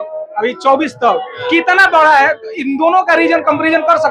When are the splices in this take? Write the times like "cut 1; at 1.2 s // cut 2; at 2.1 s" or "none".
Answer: none